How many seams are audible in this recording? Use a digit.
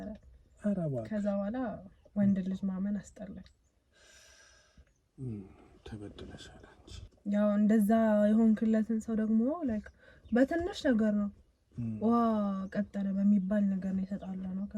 1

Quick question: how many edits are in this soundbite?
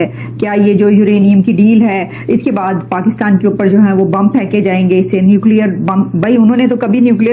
0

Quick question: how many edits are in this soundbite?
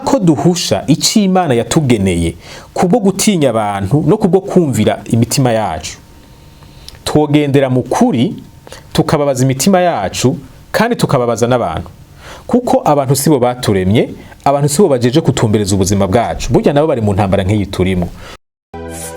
1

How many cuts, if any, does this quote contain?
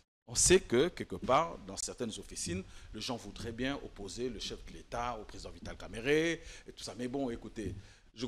0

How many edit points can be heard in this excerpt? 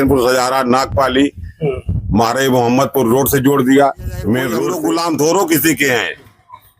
1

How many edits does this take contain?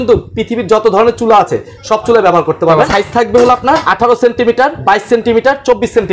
3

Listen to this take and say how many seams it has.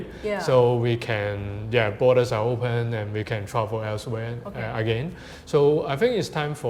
0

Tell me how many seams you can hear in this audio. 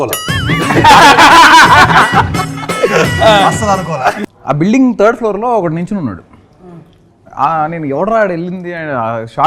1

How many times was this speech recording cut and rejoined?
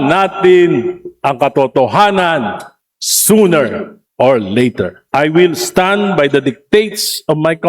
1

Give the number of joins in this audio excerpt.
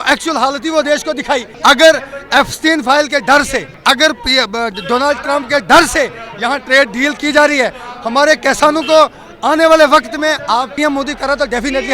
3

